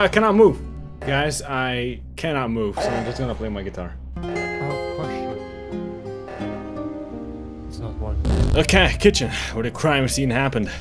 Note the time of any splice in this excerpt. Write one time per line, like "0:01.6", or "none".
0:01.0
0:08.4